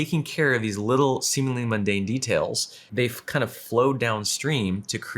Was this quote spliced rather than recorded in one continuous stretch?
yes; 1 cut; at 2.9 s

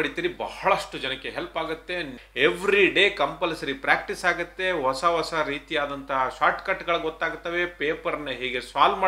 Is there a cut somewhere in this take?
yes; 1 cut; at 2.2 s

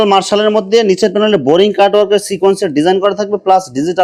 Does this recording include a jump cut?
no; 0 cuts

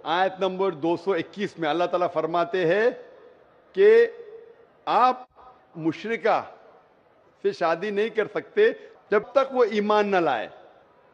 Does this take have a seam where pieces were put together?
yes; 1 cut; at 1.0 s

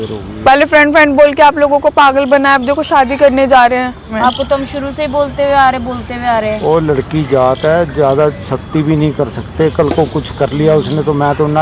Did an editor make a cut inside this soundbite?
no; 0 cuts

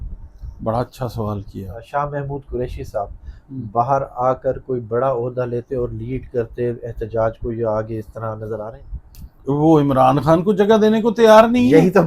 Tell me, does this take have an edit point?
yes; 2 cuts; at 1.8 s, 8.8 s

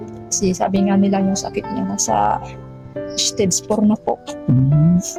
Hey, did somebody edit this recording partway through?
no; 0 cuts

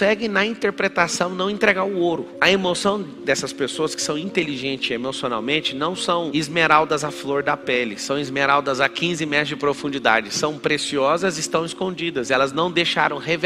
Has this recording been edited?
no; 0 cuts

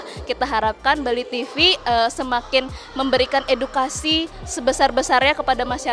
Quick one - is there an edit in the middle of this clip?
no; 0 cuts

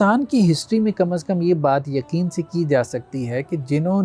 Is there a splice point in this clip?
no; 0 cuts

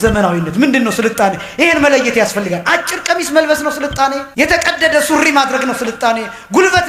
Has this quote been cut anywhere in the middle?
yes; 1 cut; at 4.3 s

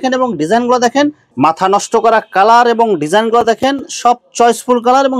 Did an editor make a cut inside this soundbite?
yes; 1 cut; at 1.2 s

